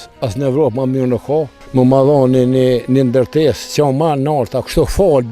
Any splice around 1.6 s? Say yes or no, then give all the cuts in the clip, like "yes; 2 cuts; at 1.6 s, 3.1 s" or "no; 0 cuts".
yes; 1 cut; at 1.6 s